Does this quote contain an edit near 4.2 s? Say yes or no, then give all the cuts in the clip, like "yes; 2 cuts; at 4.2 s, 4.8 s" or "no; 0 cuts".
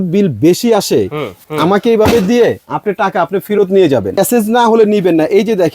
yes; 2 cuts; at 1.4 s, 4.2 s